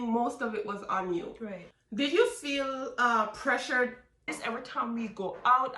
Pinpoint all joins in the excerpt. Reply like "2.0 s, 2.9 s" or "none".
1.7 s, 4.3 s

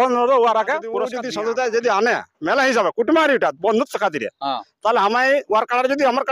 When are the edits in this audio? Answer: 1.2 s

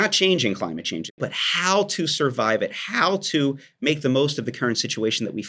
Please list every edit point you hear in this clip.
1.1 s

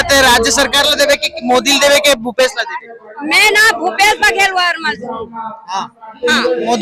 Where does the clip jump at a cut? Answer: none

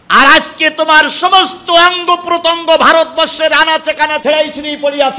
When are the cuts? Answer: 4.2 s

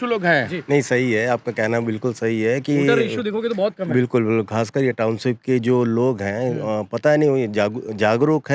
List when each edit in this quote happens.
none

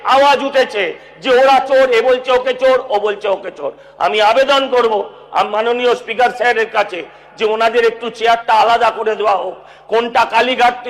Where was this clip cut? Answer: none

